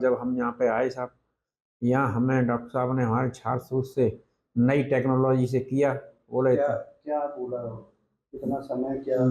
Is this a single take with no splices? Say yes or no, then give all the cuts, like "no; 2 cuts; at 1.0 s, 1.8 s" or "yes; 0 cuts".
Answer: yes; 0 cuts